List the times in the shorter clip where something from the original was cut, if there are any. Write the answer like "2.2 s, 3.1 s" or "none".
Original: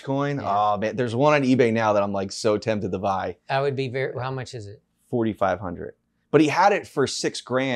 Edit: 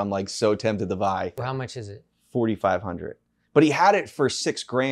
1.4 s